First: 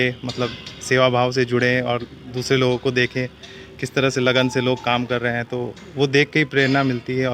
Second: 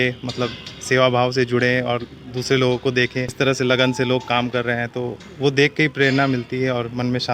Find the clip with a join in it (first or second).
second